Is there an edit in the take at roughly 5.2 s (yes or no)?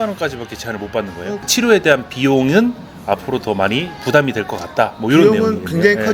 no